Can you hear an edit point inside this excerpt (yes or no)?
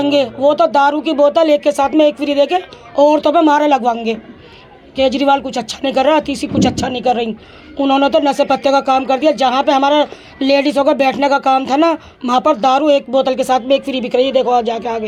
no